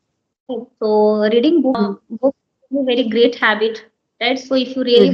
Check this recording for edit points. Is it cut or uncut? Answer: cut